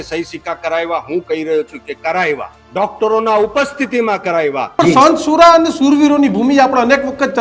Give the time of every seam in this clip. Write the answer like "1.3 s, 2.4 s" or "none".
2.6 s, 4.8 s

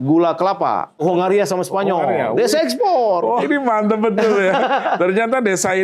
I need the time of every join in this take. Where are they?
1.0 s, 3.5 s

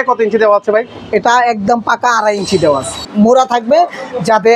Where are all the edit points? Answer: 3.0 s

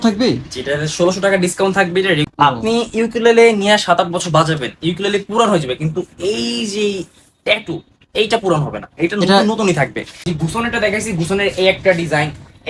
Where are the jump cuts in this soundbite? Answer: 2.2 s, 10.3 s

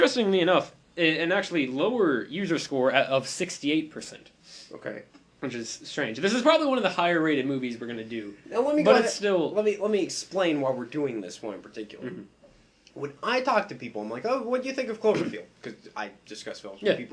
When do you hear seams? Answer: 9.5 s

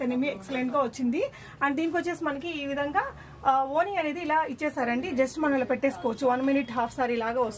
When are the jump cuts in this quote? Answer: none

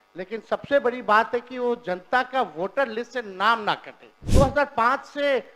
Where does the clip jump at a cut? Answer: 4.3 s

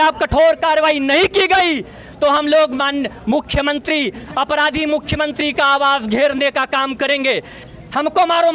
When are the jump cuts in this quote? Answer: 7.6 s

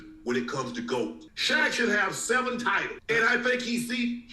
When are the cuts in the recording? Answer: 1.3 s

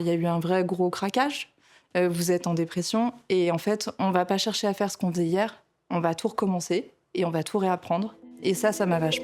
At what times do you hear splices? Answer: 8.3 s

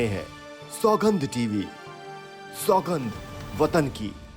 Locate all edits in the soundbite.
none

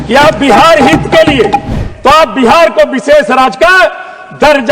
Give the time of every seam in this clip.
1.7 s

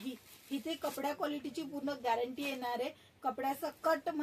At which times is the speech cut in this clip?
none

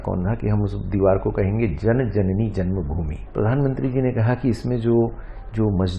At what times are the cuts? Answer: 3.1 s

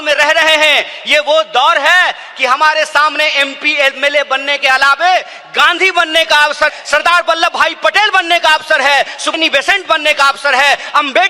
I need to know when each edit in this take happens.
6.7 s, 9.3 s

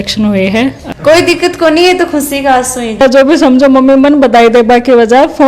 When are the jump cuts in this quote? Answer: 0.9 s, 3.0 s

